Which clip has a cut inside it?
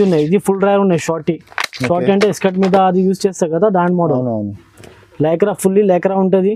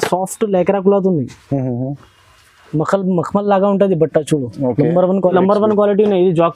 second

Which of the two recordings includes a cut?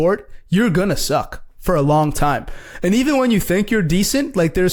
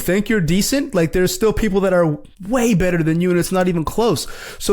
second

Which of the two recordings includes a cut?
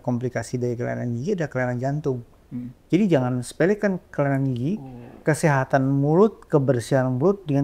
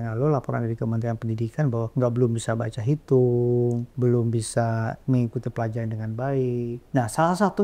second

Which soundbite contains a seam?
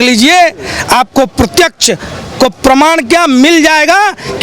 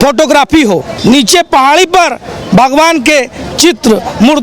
second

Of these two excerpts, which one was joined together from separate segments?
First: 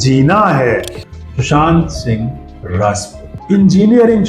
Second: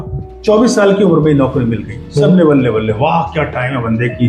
first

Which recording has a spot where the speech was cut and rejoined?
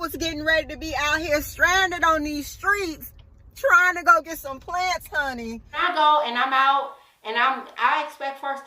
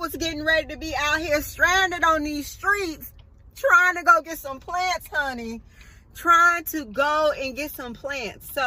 first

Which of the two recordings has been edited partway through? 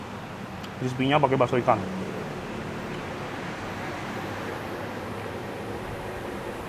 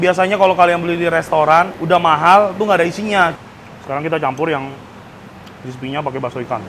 second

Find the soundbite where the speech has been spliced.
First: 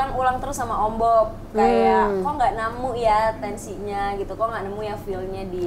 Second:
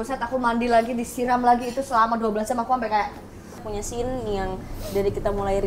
second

